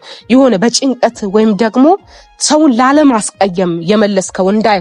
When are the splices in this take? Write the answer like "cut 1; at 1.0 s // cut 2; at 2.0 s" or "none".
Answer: none